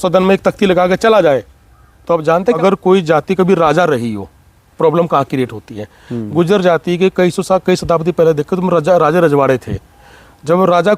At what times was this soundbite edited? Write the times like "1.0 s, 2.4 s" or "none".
2.6 s